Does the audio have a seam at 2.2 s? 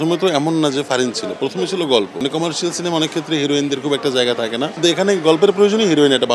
yes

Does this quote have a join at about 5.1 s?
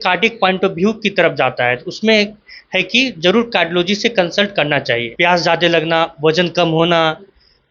yes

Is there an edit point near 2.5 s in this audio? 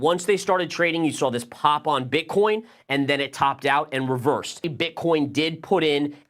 no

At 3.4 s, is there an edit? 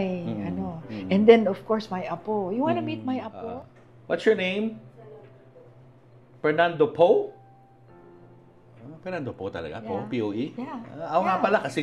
yes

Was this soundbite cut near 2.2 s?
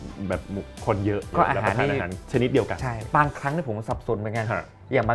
yes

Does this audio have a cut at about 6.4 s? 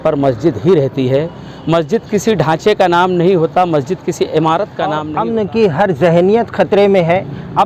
no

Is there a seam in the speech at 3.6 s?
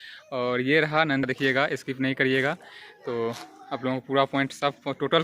no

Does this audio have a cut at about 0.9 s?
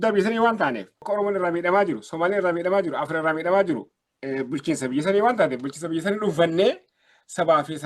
yes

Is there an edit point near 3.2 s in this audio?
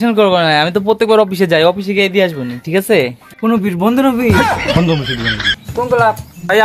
no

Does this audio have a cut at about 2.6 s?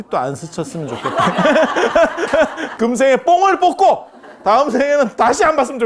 yes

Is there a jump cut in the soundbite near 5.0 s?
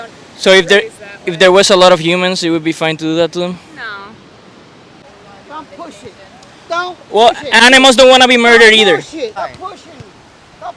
yes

